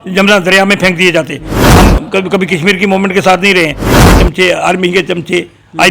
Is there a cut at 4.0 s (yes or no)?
yes